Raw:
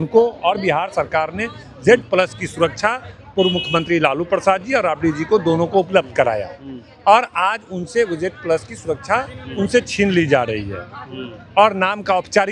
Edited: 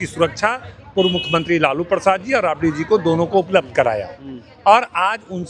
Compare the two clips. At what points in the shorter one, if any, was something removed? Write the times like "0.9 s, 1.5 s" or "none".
none